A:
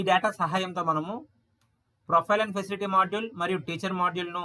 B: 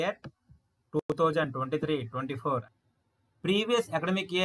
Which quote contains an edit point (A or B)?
B